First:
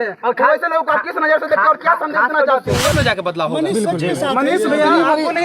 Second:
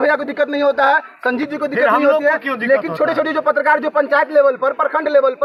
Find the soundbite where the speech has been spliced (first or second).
first